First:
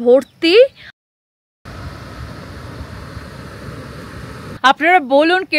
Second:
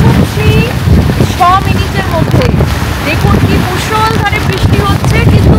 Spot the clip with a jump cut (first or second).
first